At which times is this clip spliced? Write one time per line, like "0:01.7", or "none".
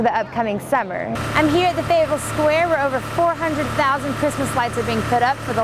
0:01.1